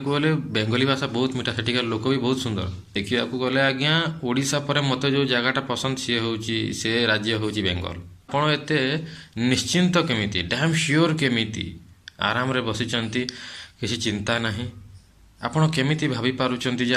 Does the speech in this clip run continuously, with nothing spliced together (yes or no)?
no